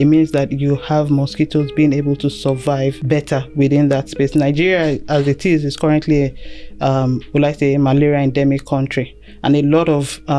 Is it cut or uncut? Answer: cut